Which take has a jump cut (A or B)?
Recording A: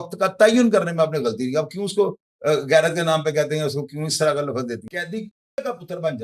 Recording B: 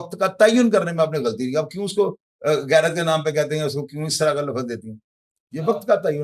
A